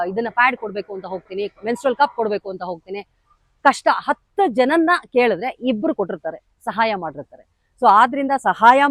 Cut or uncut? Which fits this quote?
uncut